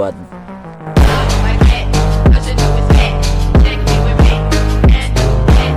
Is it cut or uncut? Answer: uncut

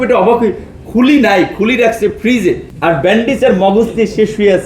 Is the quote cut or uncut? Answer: cut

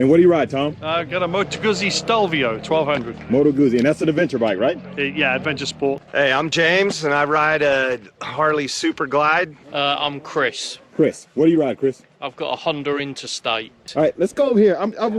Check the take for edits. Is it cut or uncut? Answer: cut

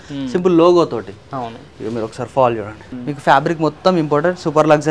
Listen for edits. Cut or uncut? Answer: cut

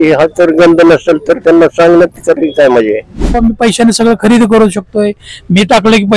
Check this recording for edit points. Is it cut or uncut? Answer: cut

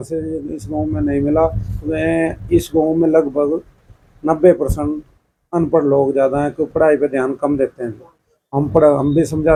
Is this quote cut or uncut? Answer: uncut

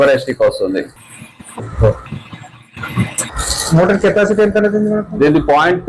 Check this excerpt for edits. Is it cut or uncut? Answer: cut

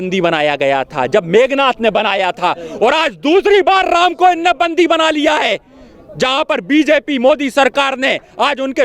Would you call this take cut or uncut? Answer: uncut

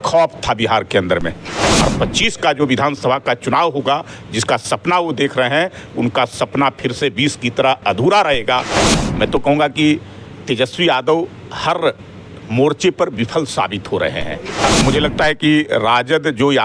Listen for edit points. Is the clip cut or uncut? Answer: cut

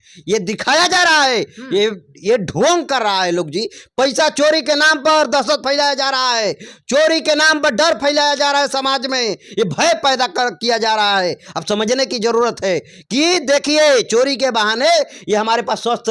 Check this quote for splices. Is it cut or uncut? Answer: uncut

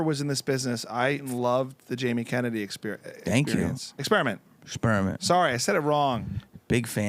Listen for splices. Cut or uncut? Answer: cut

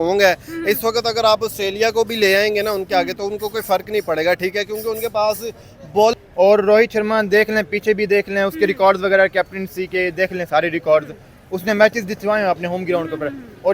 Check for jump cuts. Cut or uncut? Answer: cut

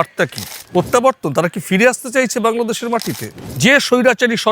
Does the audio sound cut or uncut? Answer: cut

